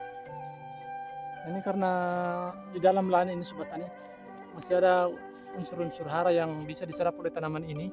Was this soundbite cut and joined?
yes; 1 cut; at 1.4 s

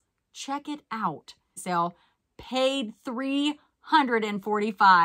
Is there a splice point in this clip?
yes; 1 cut; at 1.6 s

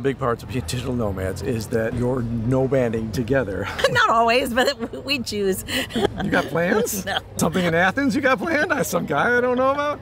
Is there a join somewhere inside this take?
yes; 4 cuts; at 1.9 s, 3.7 s, 6.1 s, 7.3 s

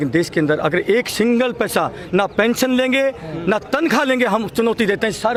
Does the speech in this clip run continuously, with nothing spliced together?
yes; 0 cuts

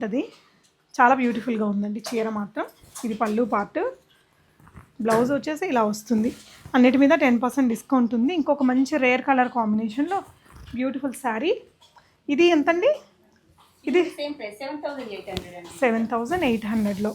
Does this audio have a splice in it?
no; 0 cuts

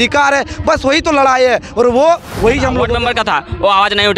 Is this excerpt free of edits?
no; 1 cut; at 2.9 s

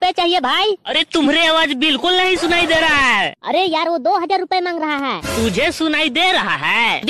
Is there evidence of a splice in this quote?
no; 0 cuts

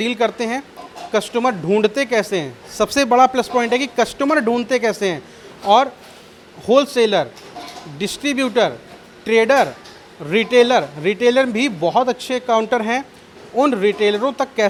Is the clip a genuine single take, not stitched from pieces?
yes; 0 cuts

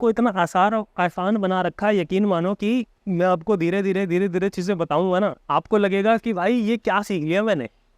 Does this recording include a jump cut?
yes; 2 cuts; at 3.0 s, 5.4 s

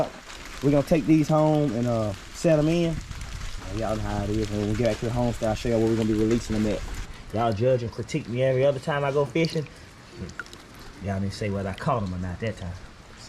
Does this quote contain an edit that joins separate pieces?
yes; 1 cut; at 7.1 s

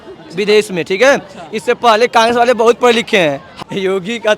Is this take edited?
yes; 1 cut; at 3.5 s

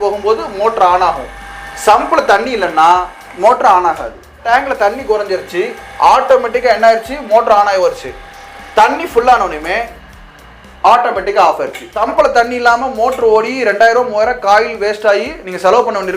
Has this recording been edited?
yes; 2 cuts; at 4.5 s, 11.9 s

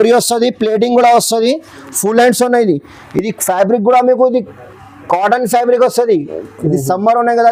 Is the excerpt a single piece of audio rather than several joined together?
yes; 0 cuts

